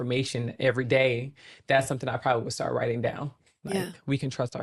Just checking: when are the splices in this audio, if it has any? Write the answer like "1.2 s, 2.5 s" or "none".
none